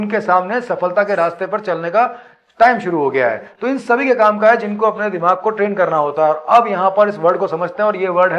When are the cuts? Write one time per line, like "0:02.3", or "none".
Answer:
none